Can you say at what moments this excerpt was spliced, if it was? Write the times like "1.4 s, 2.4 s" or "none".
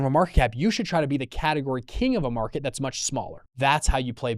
3.4 s